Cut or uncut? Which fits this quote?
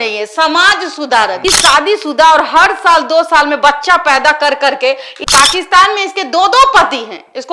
cut